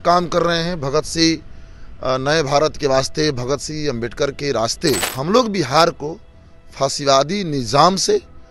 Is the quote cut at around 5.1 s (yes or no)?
yes